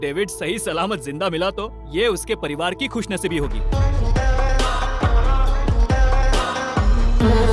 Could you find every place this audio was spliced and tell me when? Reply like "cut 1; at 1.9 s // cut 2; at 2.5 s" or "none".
cut 1; at 3.6 s

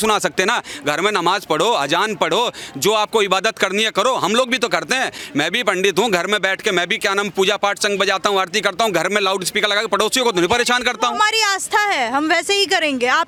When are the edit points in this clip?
none

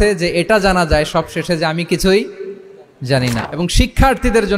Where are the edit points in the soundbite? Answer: cut 1; at 3.4 s

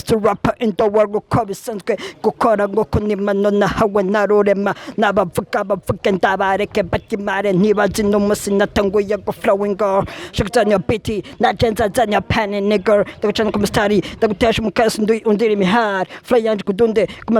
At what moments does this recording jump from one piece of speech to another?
none

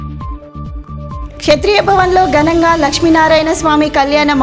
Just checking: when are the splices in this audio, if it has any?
cut 1; at 1.1 s

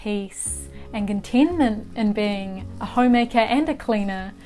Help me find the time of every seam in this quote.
none

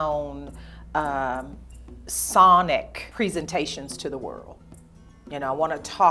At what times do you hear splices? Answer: cut 1; at 3.0 s

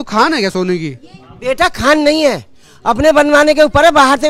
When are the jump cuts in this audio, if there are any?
none

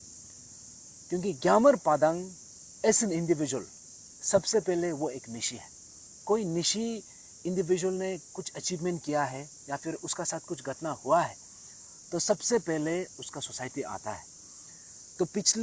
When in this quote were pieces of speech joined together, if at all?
cut 1; at 6.1 s

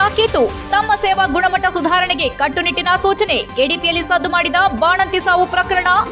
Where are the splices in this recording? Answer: none

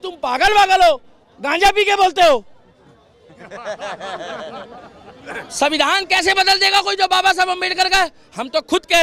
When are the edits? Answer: none

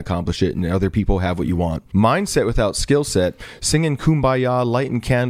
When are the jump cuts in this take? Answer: cut 1; at 1.8 s

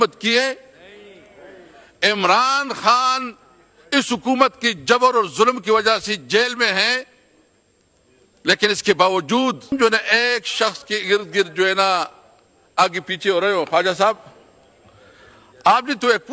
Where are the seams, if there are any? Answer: cut 1; at 9.7 s

